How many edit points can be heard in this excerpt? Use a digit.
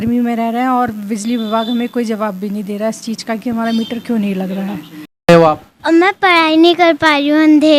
1